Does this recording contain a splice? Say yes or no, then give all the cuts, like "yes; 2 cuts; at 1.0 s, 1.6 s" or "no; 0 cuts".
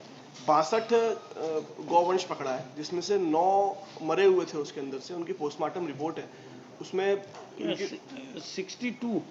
no; 0 cuts